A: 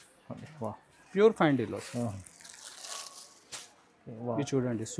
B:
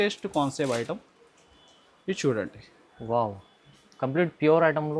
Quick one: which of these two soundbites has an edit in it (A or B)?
A